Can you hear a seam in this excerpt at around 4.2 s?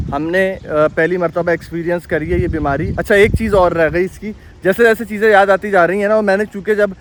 no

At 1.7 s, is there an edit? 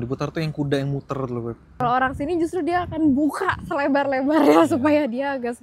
yes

